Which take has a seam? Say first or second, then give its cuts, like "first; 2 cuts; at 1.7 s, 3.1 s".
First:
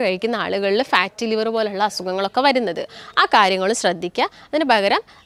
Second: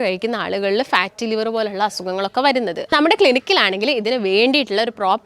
second; 1 cut; at 2.9 s